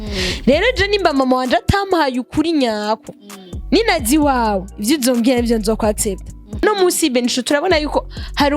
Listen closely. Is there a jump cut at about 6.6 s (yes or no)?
yes